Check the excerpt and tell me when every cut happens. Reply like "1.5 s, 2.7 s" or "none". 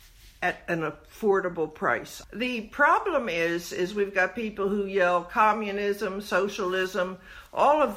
2.1 s